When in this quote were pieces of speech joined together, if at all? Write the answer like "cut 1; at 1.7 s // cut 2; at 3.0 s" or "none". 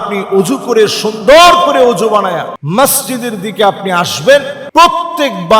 cut 1; at 2.5 s // cut 2; at 4.6 s